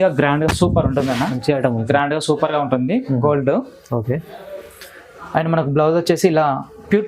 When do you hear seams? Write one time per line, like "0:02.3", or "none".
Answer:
0:01.8